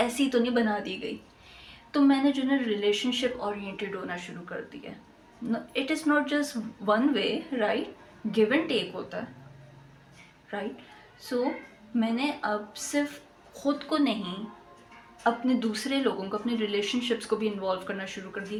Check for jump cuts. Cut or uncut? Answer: uncut